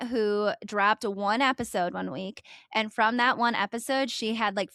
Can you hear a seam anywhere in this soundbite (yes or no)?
no